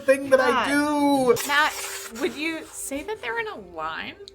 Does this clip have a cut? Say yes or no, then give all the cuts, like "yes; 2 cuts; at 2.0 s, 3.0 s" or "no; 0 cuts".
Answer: yes; 1 cut; at 1.4 s